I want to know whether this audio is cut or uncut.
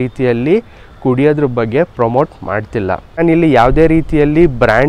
cut